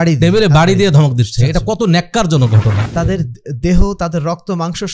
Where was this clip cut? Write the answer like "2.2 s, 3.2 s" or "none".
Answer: 2.8 s